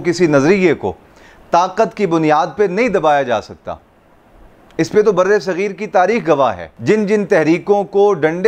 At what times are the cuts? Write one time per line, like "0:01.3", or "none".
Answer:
none